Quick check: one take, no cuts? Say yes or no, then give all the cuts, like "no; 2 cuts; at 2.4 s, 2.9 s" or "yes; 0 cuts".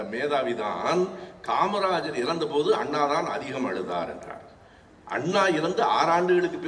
yes; 0 cuts